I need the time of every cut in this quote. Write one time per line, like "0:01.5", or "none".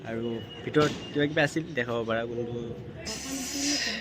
0:03.1